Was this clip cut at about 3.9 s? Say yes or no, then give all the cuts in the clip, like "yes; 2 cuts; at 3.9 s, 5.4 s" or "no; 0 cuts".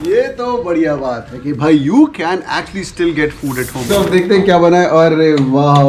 yes; 1 cut; at 3.9 s